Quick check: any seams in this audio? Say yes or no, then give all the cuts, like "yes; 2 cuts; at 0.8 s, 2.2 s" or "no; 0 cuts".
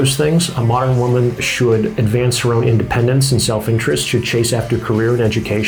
no; 0 cuts